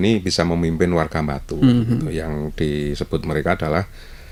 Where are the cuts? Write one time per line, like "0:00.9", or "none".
none